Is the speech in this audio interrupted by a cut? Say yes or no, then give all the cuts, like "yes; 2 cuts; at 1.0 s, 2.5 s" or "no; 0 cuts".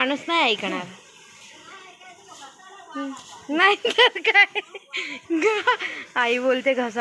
no; 0 cuts